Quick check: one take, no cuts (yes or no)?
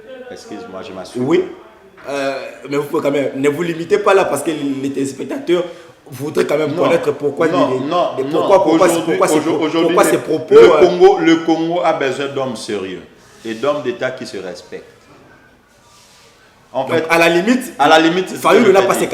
yes